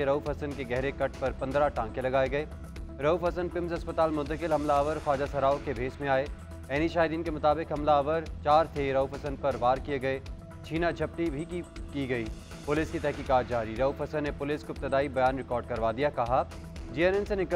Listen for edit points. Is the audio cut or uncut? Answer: uncut